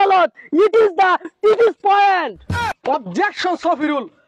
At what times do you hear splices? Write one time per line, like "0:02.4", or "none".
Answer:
0:02.7